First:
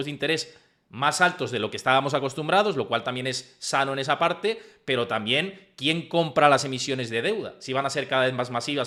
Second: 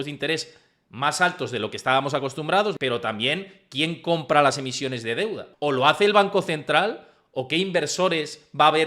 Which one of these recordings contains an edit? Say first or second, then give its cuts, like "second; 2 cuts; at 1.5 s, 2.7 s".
second; 2 cuts; at 2.8 s, 5.4 s